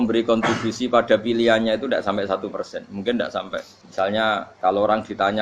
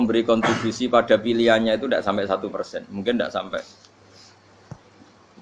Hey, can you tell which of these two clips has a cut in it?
first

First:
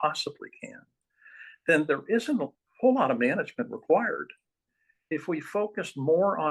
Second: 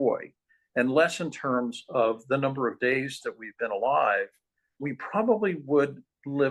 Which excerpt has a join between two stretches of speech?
first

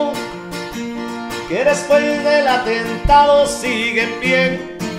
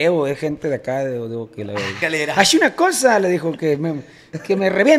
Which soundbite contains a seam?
second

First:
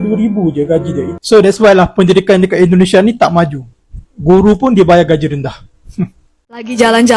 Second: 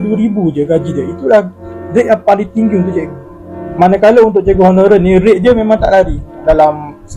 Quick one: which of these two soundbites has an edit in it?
first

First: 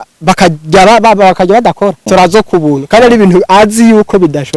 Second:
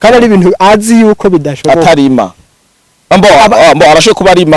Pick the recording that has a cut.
first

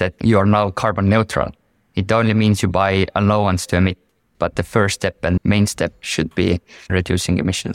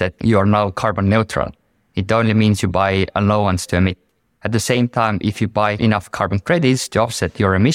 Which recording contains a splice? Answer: first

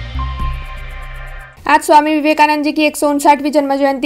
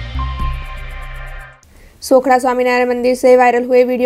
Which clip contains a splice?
second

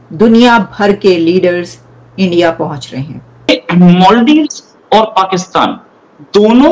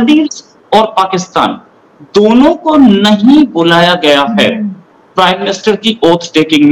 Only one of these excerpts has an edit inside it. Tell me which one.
first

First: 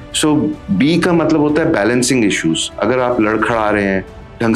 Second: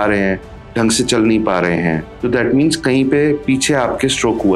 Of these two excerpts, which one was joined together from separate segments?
second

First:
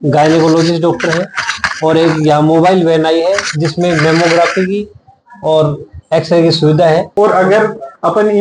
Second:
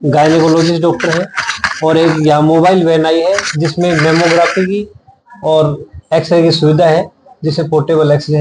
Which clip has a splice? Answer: first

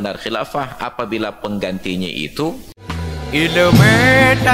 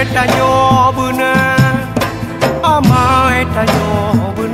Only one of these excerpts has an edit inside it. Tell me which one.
first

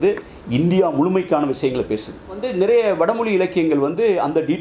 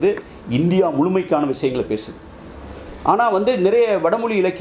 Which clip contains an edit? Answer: first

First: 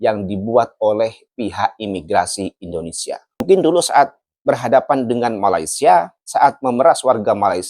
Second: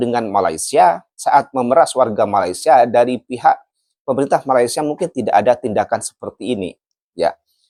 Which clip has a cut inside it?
first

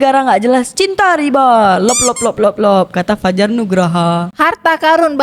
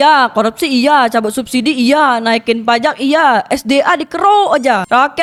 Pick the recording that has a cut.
first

